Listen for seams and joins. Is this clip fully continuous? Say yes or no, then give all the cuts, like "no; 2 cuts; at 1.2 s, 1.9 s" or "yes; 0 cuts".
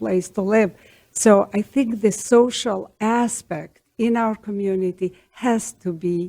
yes; 0 cuts